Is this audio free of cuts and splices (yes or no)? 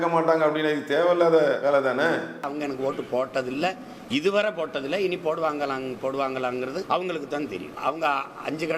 no